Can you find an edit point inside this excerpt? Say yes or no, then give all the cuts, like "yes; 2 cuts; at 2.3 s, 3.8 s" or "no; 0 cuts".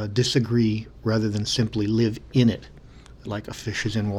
yes; 1 cut; at 3.3 s